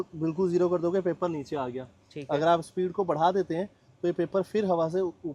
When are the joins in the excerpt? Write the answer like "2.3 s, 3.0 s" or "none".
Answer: none